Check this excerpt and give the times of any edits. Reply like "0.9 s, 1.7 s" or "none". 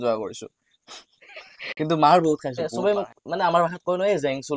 2.6 s